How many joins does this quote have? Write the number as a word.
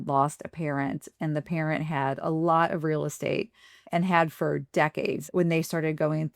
one